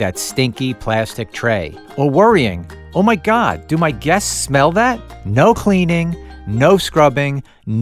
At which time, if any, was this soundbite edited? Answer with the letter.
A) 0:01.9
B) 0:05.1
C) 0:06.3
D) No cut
B